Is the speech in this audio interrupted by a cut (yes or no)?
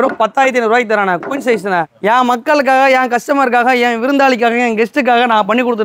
no